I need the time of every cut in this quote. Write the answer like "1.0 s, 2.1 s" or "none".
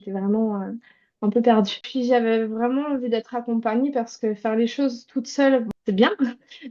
1.9 s, 5.7 s